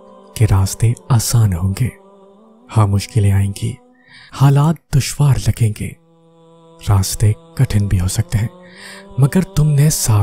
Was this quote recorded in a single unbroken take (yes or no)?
yes